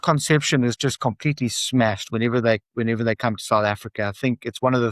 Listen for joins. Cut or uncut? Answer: uncut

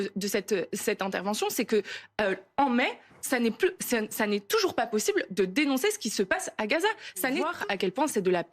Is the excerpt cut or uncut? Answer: cut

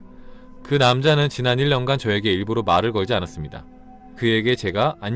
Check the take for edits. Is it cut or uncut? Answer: cut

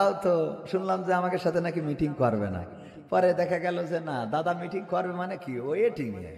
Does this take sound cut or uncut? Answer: uncut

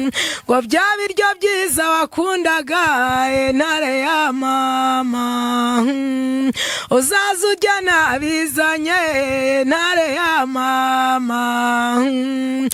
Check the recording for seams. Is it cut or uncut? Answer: uncut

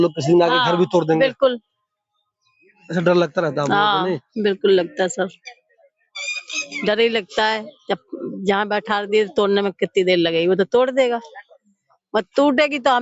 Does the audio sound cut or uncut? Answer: uncut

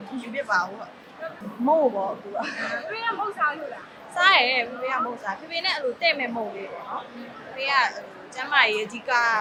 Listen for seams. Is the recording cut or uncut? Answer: uncut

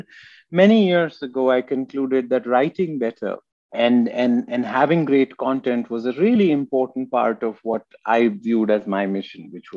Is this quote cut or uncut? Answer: uncut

